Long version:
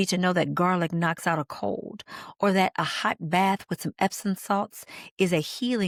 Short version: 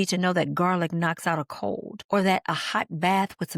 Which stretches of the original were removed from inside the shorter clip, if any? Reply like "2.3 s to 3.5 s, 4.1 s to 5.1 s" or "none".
1.9 s to 2.2 s